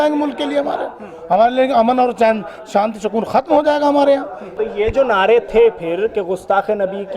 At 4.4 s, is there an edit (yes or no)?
yes